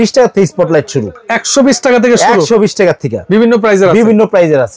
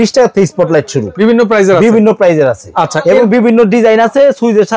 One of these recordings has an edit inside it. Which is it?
second; 1 cut; at 1.0 s

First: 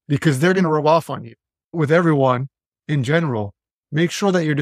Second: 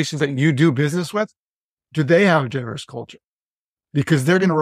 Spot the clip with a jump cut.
first; 1 cut; at 1.7 s

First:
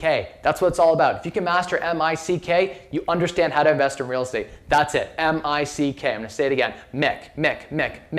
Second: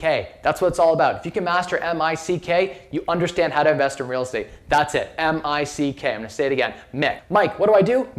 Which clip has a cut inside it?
second; 1 cut; at 7.2 s

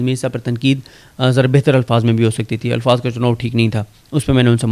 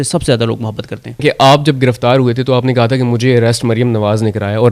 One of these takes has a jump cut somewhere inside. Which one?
second; 1 cut; at 1.2 s

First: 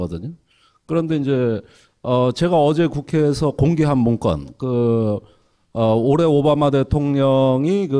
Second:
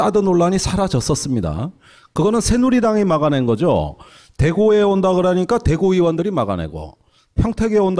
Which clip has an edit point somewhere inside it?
first; 1 cut; at 1.2 s

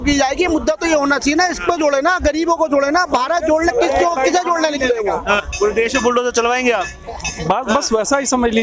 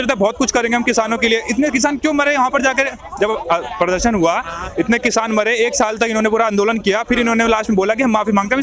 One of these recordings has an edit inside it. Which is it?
first; 1 cut; at 5.4 s

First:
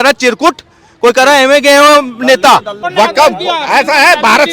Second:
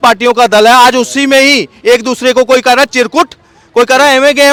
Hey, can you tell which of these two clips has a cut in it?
first; 1 cut; at 2.8 s

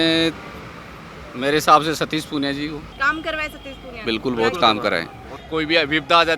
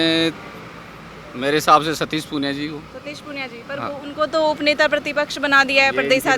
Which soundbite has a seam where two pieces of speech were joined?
first; 2 cuts; at 2.9 s, 5.3 s

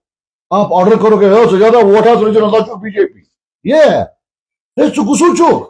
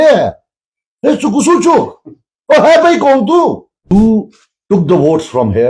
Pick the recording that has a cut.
second; 1 cut; at 3.9 s

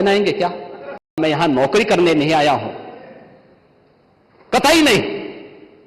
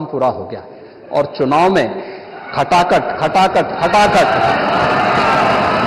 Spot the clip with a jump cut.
first; 1 cut; at 1.2 s

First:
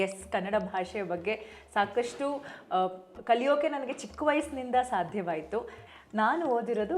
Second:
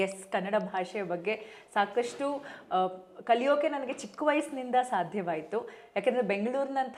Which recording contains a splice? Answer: first; 1 cut; at 5.8 s

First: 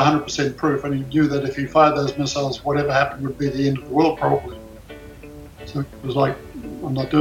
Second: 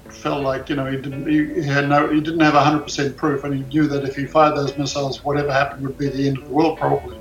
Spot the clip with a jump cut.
first; 1 cut; at 5.5 s

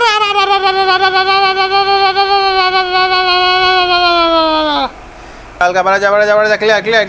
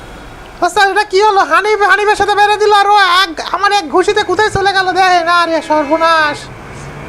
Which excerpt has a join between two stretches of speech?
first; 1 cut; at 4.9 s

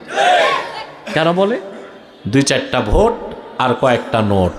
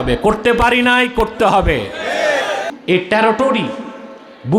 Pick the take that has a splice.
second; 1 cut; at 2.7 s

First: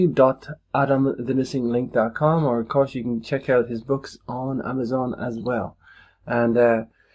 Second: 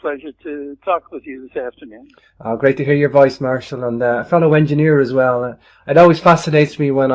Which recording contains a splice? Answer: first; 1 cut; at 4.7 s

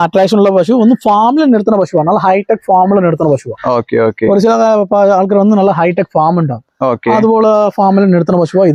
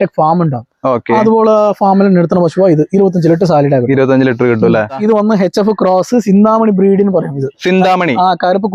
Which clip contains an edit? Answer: second; 1 cut; at 4.8 s

